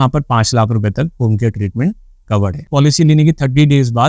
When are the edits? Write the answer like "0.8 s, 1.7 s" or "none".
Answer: 2.6 s